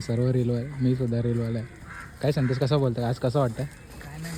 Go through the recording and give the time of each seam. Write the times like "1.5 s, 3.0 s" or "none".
none